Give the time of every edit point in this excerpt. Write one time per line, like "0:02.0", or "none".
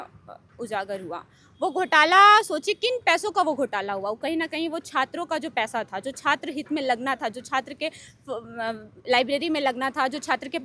none